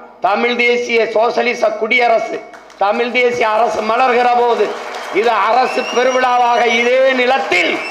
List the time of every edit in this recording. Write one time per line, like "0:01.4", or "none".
none